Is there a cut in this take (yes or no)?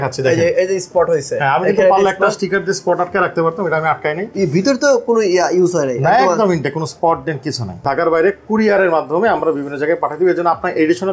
yes